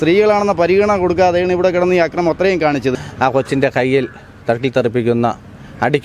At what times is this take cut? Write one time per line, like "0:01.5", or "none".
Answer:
0:02.9